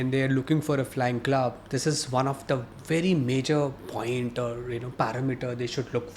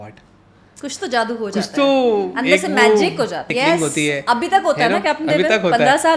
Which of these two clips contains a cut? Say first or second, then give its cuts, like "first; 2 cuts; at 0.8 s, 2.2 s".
second; 1 cut; at 3.5 s